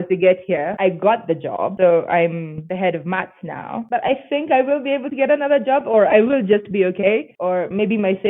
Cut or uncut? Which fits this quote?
cut